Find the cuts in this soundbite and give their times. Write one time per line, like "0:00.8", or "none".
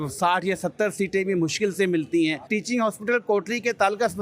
0:02.5